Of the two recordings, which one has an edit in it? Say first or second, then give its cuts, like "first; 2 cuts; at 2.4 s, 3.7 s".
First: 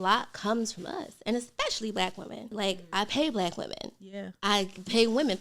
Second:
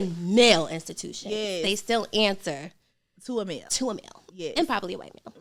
first; 1 cut; at 2.5 s